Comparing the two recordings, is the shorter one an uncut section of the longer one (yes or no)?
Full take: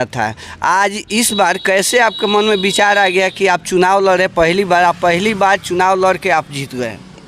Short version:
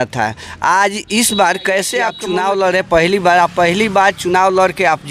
no